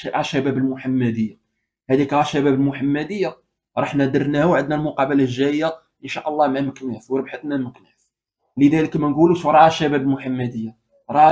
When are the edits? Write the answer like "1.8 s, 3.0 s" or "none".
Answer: none